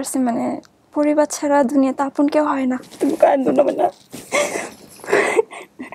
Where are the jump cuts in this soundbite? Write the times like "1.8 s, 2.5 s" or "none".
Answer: 2.9 s